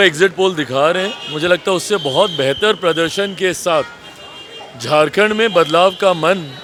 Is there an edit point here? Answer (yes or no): no